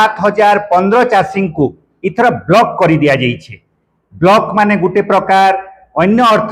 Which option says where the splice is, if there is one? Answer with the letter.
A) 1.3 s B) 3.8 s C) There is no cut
A